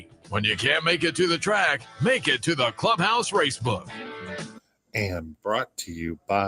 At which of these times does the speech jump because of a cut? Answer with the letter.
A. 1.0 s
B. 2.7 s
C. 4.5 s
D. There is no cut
C